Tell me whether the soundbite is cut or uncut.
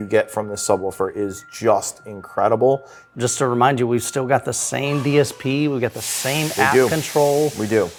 uncut